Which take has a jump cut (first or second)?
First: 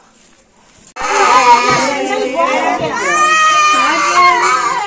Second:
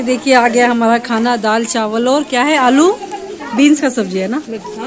first